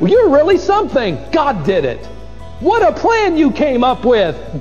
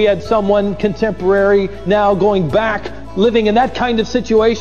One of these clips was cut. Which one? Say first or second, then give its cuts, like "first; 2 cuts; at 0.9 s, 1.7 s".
second; 1 cut; at 2.9 s